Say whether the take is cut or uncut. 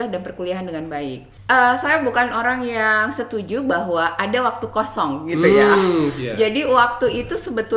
cut